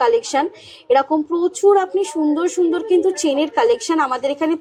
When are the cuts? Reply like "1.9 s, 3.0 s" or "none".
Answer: none